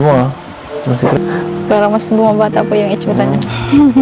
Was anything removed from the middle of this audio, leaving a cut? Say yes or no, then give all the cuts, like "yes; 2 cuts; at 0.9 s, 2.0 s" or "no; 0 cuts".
yes; 1 cut; at 1.2 s